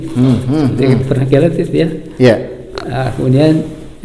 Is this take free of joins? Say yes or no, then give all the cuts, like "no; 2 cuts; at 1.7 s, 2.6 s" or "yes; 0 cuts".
yes; 0 cuts